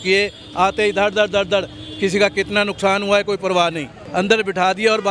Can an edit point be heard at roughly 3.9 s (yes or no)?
yes